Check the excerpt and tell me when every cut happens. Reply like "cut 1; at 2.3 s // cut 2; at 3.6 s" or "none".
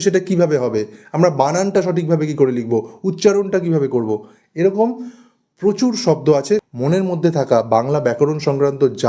cut 1; at 6.6 s